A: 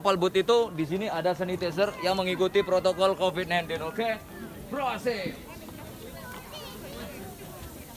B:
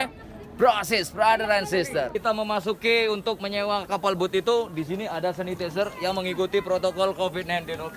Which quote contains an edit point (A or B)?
B